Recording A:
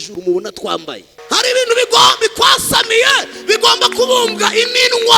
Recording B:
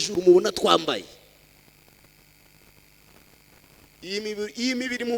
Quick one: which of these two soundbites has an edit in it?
A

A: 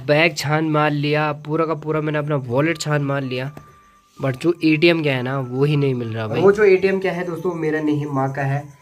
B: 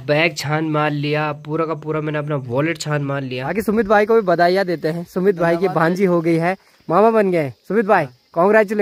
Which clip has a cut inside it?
B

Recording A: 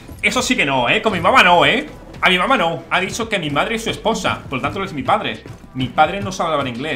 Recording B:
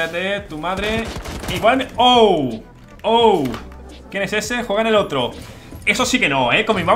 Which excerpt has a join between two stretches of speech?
A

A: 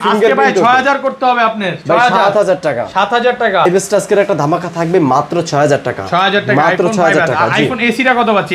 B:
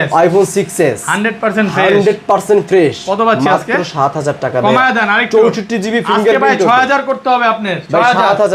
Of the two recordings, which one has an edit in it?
A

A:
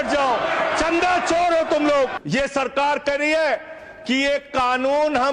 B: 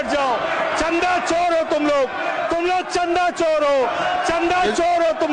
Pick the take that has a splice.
A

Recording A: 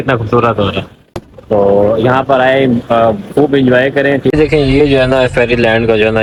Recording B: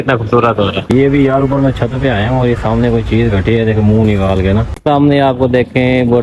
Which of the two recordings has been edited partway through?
B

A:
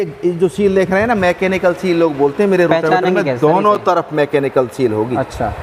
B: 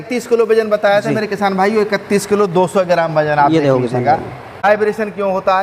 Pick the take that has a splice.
B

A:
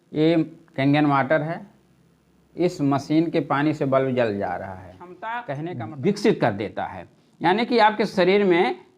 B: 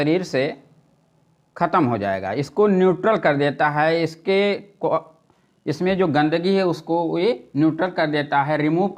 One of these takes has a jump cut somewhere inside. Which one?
A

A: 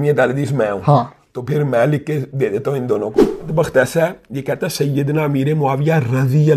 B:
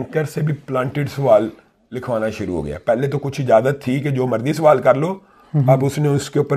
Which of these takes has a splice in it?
A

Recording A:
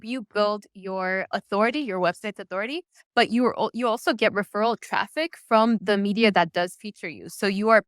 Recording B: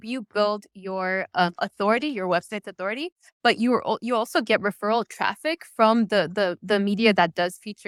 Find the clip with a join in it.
A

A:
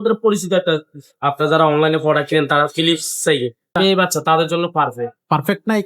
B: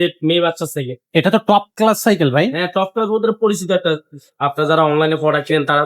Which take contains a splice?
A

